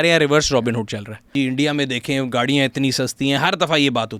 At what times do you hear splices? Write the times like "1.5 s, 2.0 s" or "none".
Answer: 1.3 s